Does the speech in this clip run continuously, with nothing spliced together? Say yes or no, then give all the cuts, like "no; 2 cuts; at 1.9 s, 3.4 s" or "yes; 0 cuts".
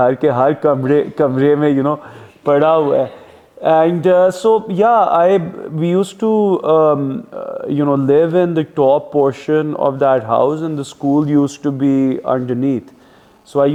yes; 0 cuts